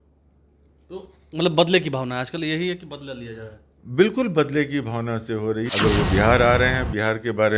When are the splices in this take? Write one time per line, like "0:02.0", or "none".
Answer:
0:05.7